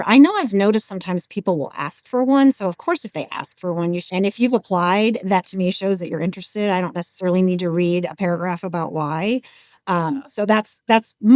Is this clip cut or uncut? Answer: cut